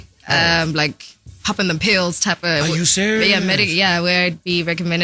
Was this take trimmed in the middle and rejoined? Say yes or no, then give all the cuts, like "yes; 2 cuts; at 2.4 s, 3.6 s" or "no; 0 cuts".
no; 0 cuts